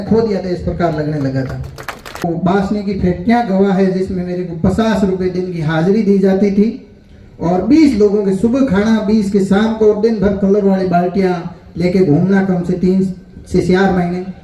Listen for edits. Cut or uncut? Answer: cut